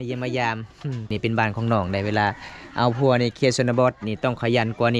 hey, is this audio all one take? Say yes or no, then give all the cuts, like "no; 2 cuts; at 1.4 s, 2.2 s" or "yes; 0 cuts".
no; 1 cut; at 1.1 s